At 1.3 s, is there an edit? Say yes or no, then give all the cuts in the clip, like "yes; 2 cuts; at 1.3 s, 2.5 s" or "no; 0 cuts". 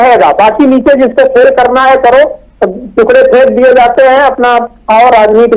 no; 0 cuts